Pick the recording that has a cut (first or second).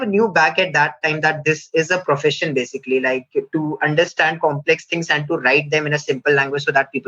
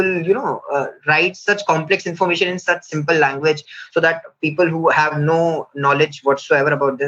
second